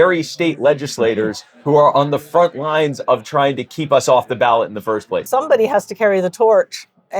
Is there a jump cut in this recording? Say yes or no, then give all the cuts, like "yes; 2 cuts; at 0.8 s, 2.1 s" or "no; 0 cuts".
yes; 1 cut; at 5.2 s